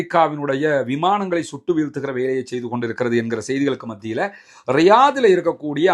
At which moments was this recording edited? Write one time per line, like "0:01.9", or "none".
none